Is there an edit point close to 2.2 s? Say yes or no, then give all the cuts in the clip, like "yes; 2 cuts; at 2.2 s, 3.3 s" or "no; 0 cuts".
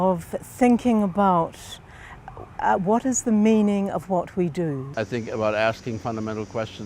no; 1 cut; at 4.9 s